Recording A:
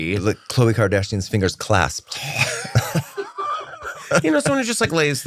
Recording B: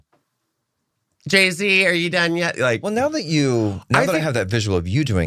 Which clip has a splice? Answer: A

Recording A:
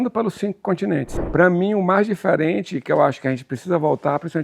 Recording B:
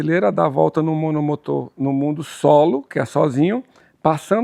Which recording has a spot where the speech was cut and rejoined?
A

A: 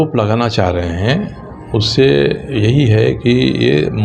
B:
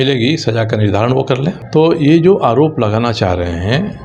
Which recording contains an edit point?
B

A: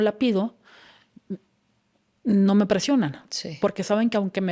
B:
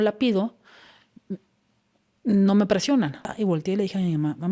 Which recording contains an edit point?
B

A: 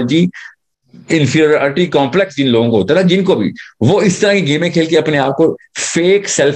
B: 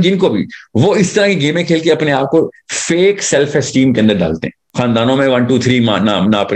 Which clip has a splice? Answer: B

